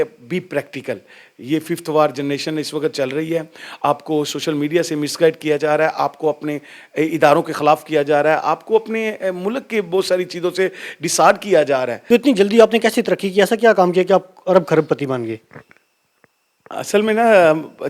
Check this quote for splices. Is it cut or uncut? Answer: cut